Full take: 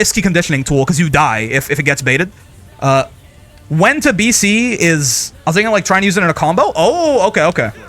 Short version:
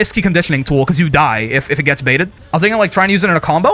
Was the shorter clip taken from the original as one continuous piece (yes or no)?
no